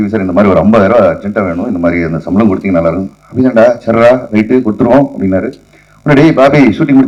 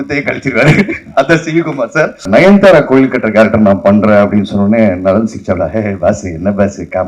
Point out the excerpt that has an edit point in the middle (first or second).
second